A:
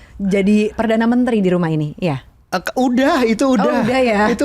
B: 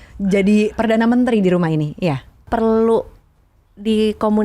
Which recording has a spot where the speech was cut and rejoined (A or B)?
B